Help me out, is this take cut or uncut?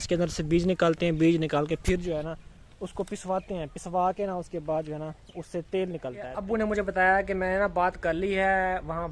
cut